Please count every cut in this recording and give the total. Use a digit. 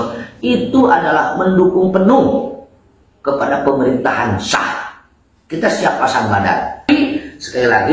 1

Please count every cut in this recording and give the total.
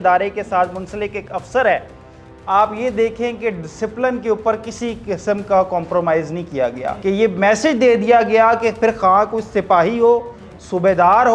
1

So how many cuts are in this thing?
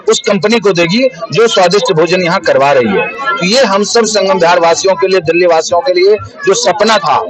0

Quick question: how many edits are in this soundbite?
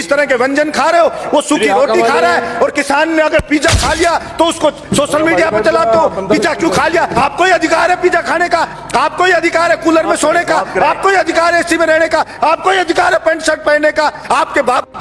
1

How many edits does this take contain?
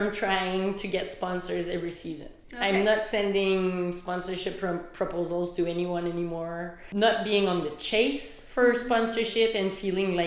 2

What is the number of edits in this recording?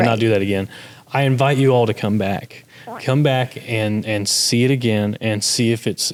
0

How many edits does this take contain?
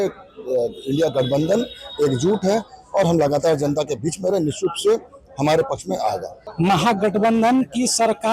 1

